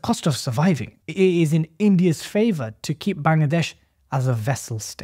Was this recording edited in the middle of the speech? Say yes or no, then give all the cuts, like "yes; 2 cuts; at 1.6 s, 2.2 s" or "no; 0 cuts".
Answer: yes; 1 cut; at 1.0 s